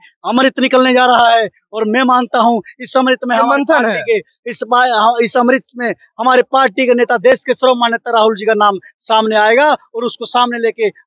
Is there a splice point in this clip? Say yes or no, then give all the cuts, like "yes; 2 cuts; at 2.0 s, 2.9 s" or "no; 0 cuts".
no; 0 cuts